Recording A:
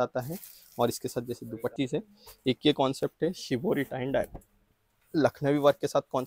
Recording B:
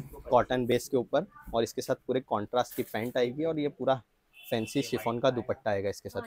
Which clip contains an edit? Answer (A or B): A